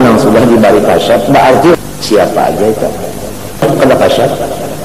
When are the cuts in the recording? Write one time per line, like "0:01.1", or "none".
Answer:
0:01.7
0:03.6

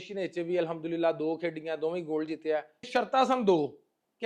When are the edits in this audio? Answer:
0:02.9

